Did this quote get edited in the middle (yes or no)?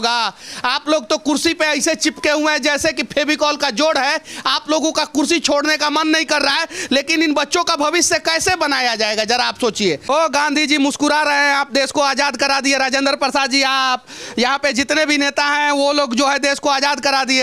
yes